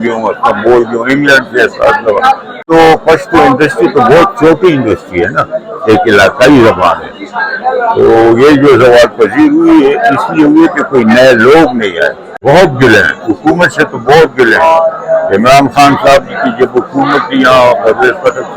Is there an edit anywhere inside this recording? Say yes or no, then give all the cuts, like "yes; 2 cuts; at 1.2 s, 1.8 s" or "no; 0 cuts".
yes; 2 cuts; at 2.7 s, 12.3 s